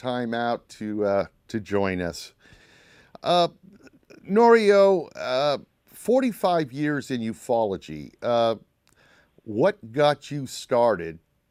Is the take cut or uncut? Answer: uncut